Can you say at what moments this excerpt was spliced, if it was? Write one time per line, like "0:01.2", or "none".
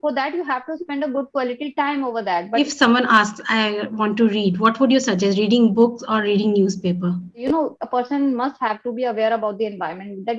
0:02.6
0:07.4